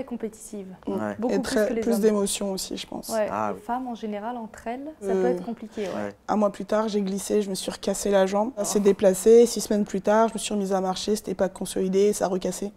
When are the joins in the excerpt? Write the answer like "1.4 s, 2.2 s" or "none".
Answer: 3.6 s, 5.1 s, 6.1 s, 8.7 s

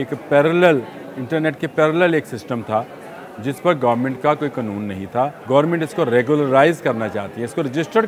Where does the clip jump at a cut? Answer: 5.4 s

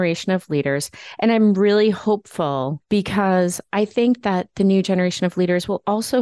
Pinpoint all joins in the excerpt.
2.8 s

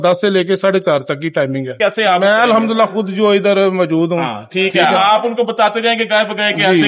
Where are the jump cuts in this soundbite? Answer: 1.7 s

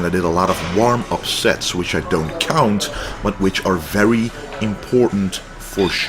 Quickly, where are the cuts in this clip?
1.5 s

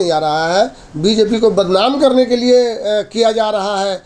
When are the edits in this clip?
none

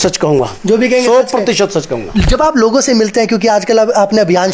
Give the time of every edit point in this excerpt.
none

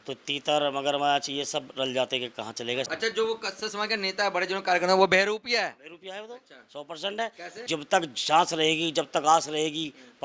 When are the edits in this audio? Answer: 2.9 s, 7.6 s

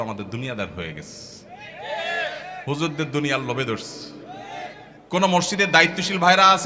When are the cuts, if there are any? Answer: 4.9 s

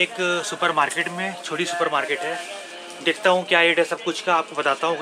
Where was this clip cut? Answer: none

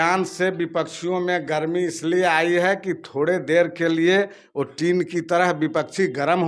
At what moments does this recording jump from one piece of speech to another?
none

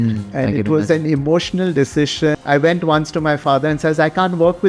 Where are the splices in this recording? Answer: 2.4 s

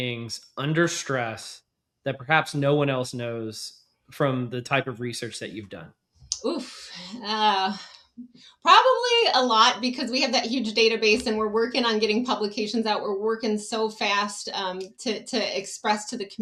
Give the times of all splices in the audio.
none

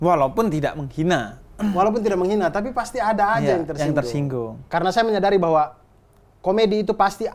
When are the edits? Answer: 4.6 s

